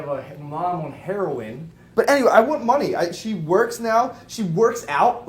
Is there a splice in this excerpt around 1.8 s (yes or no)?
yes